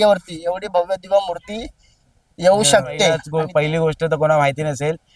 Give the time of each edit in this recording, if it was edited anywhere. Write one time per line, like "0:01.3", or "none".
0:03.2